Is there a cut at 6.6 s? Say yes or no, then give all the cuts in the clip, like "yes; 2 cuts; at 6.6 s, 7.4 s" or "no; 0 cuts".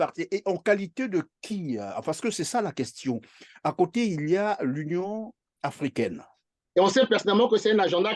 yes; 1 cut; at 6.6 s